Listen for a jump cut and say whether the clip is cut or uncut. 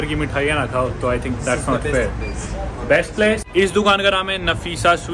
uncut